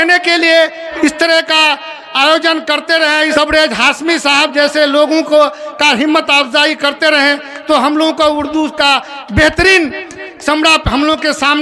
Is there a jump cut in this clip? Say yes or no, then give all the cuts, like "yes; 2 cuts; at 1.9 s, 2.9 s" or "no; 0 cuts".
yes; 2 cuts; at 0.8 s, 3.3 s